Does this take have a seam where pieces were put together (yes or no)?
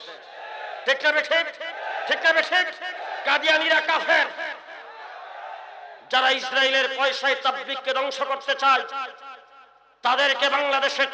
yes